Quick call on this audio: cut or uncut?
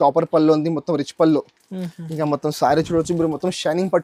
uncut